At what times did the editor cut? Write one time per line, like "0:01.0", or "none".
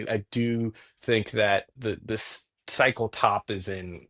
0:01.7